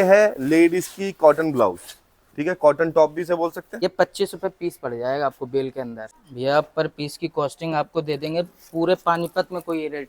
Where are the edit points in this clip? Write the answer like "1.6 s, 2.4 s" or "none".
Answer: 3.6 s, 6.0 s